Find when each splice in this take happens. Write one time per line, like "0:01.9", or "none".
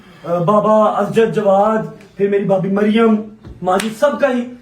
none

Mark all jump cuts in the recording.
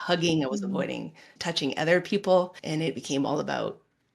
0:01.3
0:02.6

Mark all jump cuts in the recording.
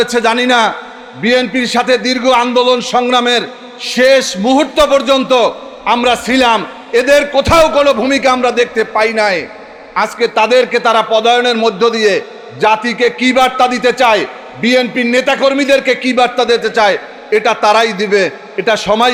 none

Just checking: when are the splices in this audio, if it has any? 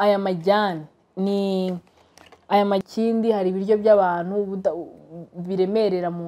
0:02.8

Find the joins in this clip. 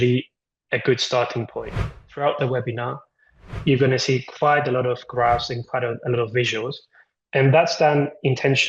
0:02.0

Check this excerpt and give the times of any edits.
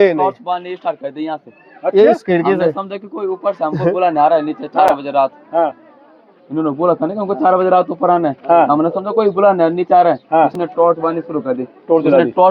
none

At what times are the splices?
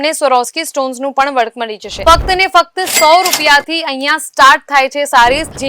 0:01.9

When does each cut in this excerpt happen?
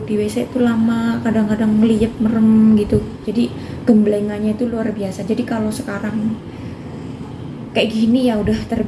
0:03.2

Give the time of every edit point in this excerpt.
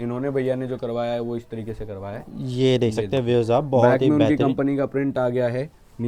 none

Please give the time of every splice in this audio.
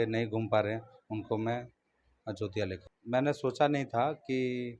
0:02.8

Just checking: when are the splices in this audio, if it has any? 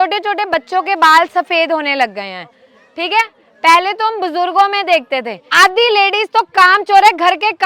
0:05.4

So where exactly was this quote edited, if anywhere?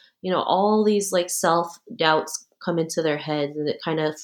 none

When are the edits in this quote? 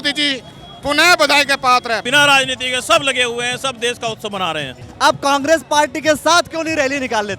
0:02.0
0:04.8

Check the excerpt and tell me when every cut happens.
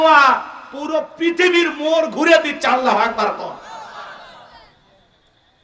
none

